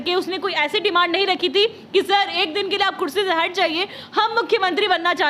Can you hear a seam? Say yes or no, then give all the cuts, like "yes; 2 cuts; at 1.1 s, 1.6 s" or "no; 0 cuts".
no; 0 cuts